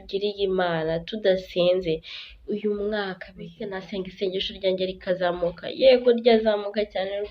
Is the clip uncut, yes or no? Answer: no